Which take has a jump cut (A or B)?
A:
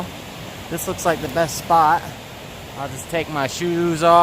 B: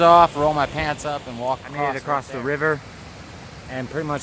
B